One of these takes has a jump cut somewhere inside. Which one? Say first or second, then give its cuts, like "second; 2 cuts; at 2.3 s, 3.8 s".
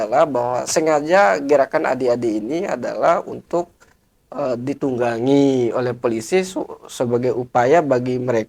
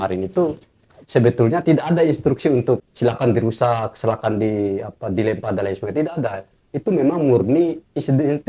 second; 1 cut; at 2.9 s